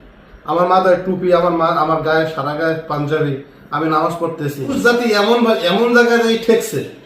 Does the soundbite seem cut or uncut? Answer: cut